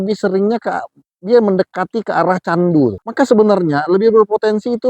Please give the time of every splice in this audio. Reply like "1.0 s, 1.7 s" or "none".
3.0 s

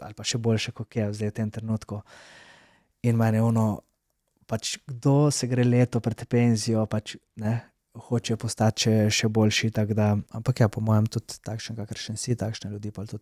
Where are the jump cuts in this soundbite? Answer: 10.3 s

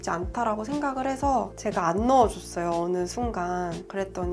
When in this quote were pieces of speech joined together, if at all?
1.5 s

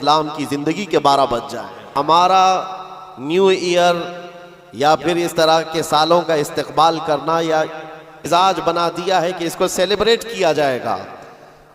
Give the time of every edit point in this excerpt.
1.9 s, 8.2 s

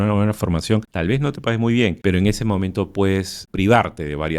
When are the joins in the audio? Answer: 0.9 s, 2.0 s, 3.4 s

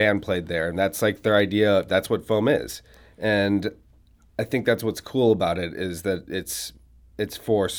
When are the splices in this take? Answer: none

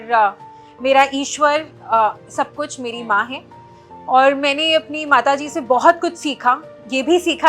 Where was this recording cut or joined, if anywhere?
none

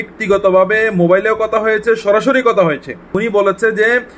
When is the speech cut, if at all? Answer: 3.1 s

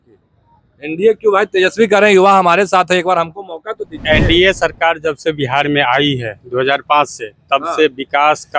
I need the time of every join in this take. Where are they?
none

